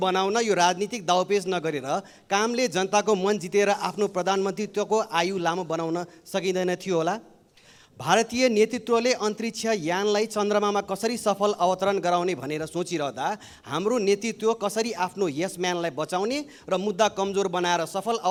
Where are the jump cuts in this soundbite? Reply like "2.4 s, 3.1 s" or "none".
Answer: none

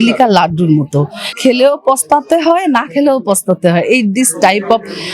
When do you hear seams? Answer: 1.3 s

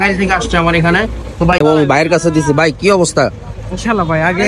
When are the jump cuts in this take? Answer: 1.6 s

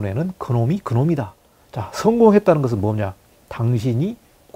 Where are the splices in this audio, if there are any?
1.4 s

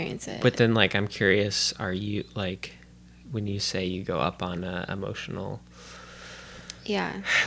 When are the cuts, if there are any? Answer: none

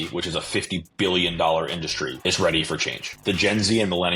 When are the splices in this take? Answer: 2.1 s, 3.2 s

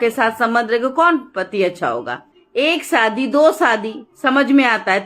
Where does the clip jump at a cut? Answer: none

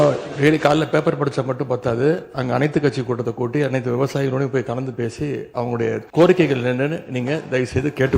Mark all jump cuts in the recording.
6.0 s

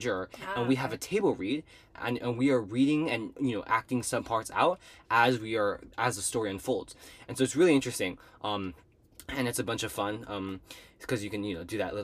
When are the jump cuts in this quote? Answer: none

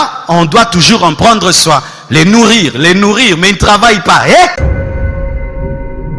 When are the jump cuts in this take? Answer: 4.6 s

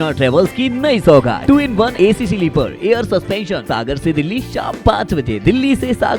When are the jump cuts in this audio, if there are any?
1.5 s, 3.6 s

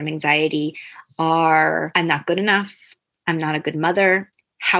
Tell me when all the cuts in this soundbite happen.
none

